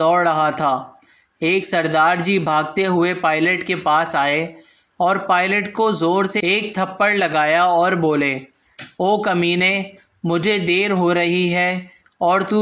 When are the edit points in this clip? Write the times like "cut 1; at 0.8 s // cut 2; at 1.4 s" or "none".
none